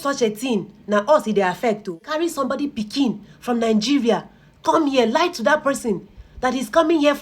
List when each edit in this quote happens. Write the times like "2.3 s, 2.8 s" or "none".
2.1 s

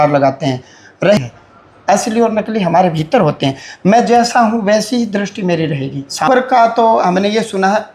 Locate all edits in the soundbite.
1.2 s, 6.3 s

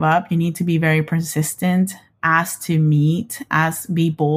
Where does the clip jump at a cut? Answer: none

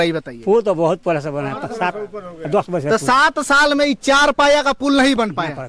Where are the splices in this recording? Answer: none

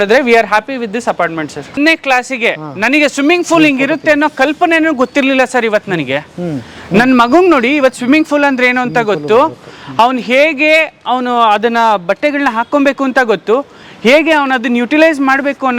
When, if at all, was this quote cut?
1.8 s

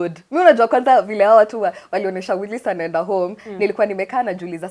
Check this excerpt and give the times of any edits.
none

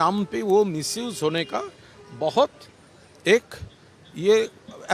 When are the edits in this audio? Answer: none

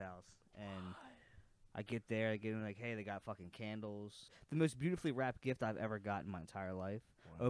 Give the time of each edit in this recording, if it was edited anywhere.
4.4 s

